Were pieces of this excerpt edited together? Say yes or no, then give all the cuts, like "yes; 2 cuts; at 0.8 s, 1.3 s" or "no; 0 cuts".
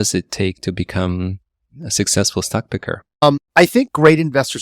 yes; 1 cut; at 3.0 s